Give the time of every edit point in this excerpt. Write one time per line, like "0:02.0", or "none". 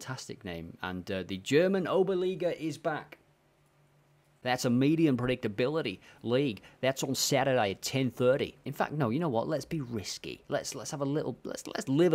0:04.3
0:08.6